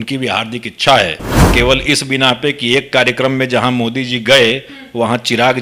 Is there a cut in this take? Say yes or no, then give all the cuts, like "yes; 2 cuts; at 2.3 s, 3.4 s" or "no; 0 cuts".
yes; 1 cut; at 1.4 s